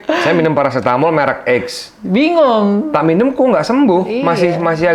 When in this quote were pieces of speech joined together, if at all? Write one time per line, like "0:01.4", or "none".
none